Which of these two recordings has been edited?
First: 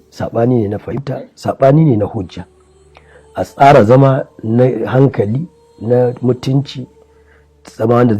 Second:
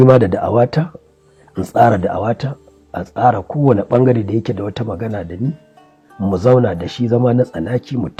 first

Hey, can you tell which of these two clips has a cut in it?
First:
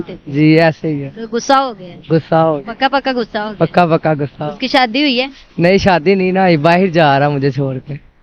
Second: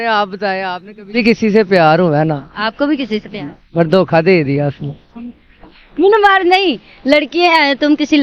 second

